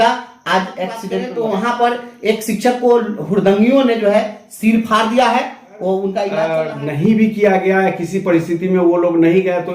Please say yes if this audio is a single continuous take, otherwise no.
no